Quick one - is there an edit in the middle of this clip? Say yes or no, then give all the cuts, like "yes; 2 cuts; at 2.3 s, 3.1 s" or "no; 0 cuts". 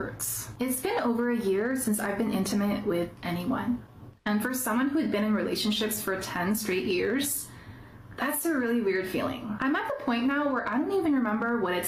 no; 0 cuts